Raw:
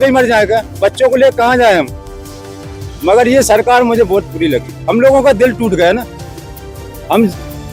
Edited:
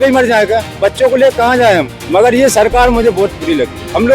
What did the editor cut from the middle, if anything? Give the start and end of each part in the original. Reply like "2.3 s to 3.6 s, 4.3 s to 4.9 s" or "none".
2.0 s to 2.9 s